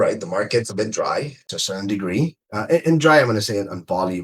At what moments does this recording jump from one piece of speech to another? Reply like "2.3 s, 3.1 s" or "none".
1.5 s

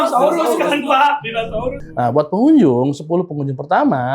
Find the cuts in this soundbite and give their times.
1.8 s

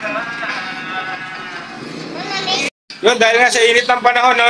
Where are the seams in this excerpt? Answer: 2.7 s

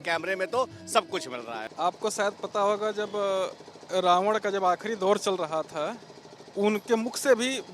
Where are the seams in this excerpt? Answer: 1.6 s

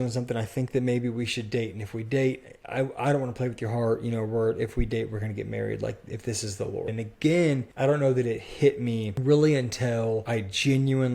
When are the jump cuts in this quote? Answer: 6.9 s, 7.7 s, 9.1 s, 10.2 s

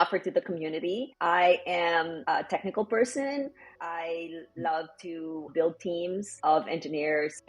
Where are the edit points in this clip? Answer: 1.1 s, 2.1 s, 3.8 s, 5.5 s, 6.3 s

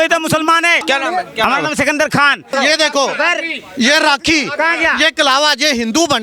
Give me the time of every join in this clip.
0.8 s, 2.5 s

